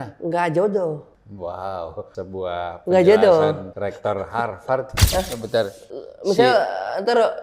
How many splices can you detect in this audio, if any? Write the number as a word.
four